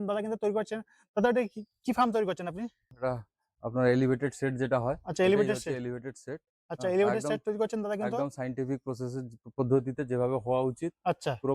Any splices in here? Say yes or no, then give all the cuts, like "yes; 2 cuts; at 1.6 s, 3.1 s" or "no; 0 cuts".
yes; 1 cut; at 2.9 s